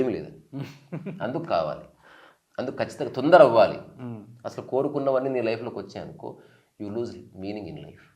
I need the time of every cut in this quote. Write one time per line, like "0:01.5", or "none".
none